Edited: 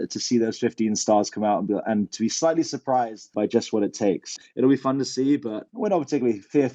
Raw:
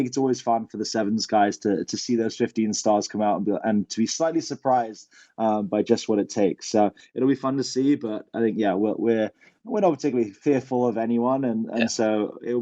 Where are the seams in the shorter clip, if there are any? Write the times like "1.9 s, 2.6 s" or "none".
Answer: 3.3 s, 4.3 s, 5.6 s